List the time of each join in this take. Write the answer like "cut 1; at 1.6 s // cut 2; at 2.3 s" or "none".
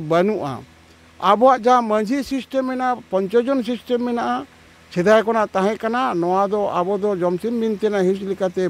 none